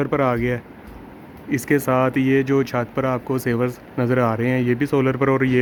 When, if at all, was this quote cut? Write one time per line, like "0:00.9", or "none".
none

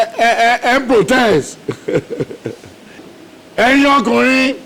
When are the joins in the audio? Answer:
0:03.1

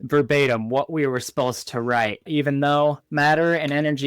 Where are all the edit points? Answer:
0:02.2
0:03.0

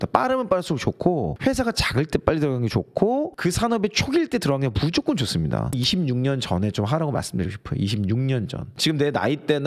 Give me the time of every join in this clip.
0:05.7
0:08.7

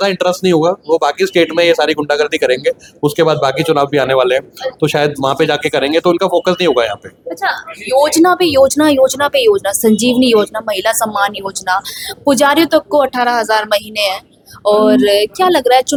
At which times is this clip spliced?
none

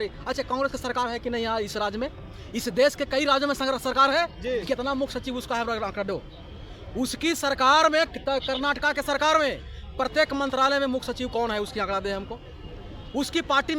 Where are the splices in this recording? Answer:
none

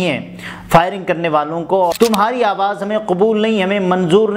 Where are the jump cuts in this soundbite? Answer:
0:01.9

